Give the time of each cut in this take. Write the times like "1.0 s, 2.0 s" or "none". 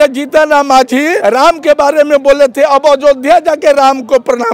1.2 s